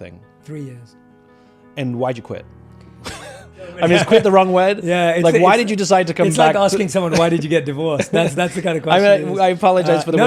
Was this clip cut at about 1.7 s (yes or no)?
no